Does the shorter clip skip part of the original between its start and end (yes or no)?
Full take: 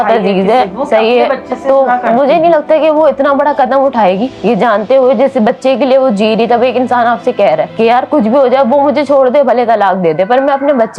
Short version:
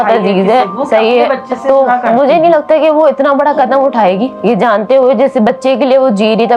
no